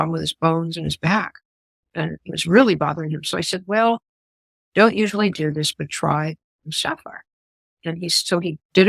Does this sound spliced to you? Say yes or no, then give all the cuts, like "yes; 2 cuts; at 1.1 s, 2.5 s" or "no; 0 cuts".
no; 0 cuts